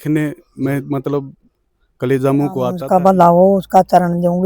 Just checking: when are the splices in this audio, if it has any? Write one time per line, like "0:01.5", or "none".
0:02.8